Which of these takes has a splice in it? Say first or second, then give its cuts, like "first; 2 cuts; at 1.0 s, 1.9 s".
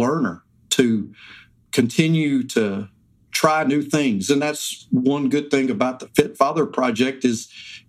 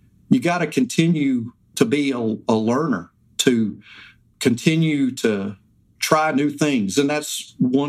second; 1 cut; at 1.7 s